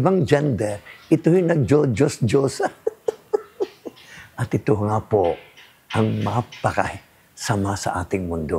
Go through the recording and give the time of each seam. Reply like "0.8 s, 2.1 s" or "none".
none